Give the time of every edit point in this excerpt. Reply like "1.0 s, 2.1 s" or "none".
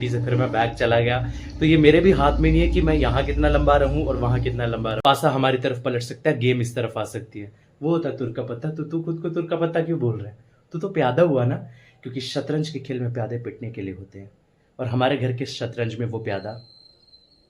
5.0 s

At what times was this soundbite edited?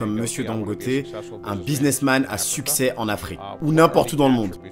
none

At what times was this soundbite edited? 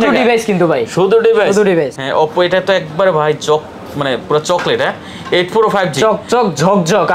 1.9 s

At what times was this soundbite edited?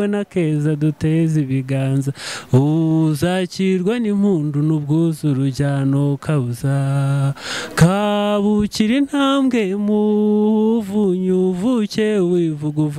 none

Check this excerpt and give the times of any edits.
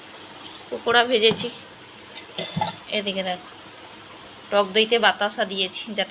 none

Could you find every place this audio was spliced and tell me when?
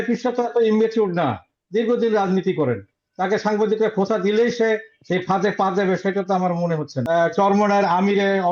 6.9 s

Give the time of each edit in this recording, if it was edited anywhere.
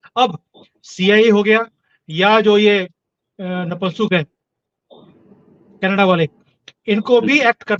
none

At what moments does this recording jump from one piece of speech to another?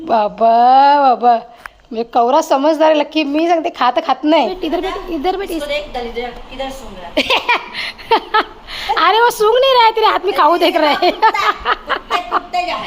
4.6 s

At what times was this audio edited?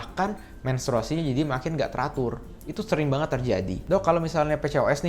3.8 s

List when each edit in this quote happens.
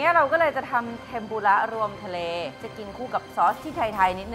2.5 s

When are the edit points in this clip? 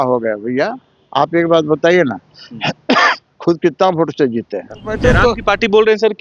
4.9 s

